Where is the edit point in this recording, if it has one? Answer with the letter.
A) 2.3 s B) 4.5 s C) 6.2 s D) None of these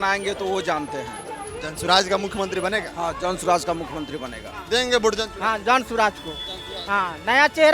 B